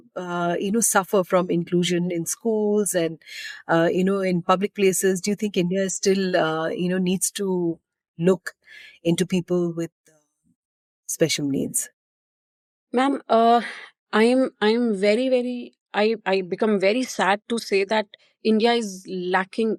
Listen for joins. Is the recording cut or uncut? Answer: uncut